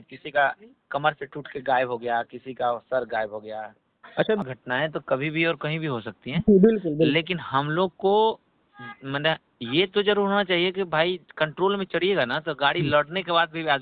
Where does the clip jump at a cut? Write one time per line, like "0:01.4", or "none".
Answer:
0:04.4